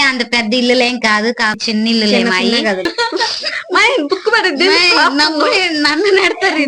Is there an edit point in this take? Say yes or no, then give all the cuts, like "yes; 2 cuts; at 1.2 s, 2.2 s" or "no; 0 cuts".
yes; 2 cuts; at 1.6 s, 2.9 s